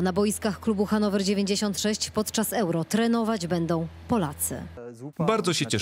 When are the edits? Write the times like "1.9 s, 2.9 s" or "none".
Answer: 4.8 s